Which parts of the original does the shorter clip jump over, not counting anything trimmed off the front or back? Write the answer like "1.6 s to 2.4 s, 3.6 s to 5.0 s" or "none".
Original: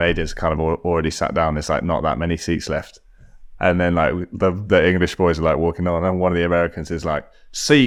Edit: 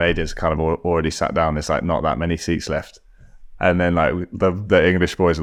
none